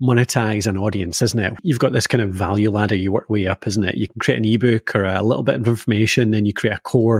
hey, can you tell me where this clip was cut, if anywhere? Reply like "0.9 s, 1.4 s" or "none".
1.6 s, 4.1 s